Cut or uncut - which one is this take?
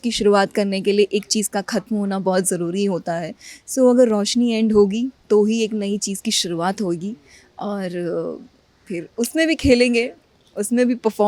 uncut